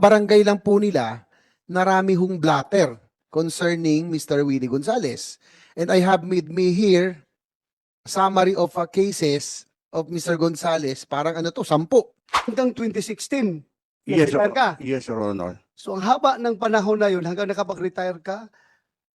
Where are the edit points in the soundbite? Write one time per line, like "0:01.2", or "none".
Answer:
0:12.5